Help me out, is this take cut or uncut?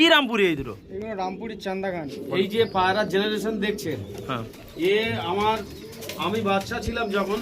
cut